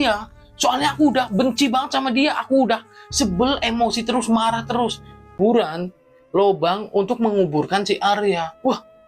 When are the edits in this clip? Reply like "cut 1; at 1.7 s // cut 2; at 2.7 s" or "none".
cut 1; at 5.4 s